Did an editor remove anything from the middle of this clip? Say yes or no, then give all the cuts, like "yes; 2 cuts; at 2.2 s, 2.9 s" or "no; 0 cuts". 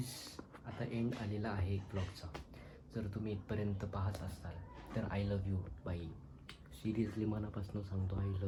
no; 0 cuts